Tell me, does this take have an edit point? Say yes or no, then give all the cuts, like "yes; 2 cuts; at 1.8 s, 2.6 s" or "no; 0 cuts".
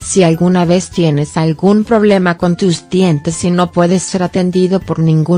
no; 0 cuts